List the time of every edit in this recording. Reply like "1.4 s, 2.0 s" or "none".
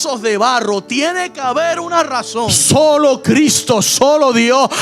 2.6 s